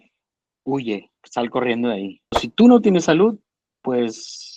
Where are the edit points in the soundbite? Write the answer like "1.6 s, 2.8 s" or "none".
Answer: 2.4 s